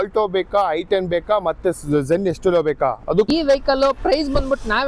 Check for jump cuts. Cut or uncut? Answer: cut